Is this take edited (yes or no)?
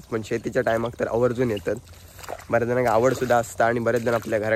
no